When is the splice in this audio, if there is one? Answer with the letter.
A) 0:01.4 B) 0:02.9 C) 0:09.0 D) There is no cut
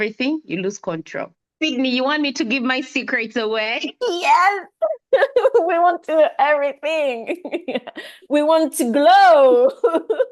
A